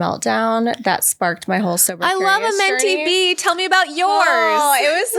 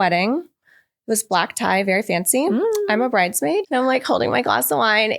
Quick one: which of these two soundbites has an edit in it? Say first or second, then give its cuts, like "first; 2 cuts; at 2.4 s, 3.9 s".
second; 1 cut; at 3.7 s